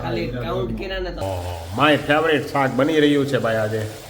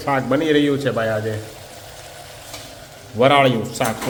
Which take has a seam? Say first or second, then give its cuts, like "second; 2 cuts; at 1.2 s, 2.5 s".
first; 1 cut; at 1.2 s